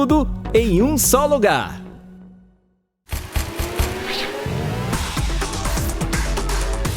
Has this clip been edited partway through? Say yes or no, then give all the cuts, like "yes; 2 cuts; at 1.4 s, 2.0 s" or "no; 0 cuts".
yes; 1 cut; at 2.9 s